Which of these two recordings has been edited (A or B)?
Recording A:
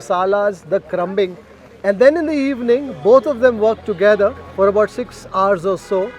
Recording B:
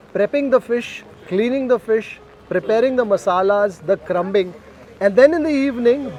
A